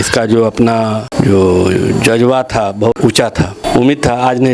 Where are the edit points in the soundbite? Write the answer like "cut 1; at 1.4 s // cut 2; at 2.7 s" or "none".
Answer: cut 1; at 1.1 s // cut 2; at 3.1 s